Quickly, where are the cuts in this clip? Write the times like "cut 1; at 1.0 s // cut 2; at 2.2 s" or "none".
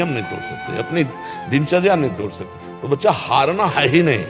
cut 1; at 2.6 s